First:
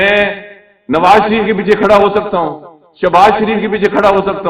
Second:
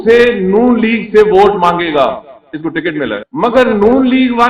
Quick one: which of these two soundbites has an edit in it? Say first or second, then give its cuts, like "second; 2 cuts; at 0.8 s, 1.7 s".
second; 1 cut; at 3.3 s